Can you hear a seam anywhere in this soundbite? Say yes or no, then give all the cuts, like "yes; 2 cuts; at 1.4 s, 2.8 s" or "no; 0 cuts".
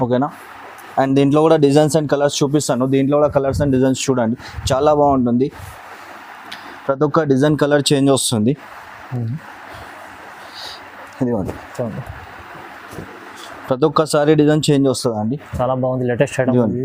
no; 0 cuts